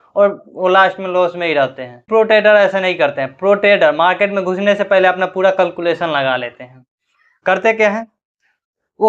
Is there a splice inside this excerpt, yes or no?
no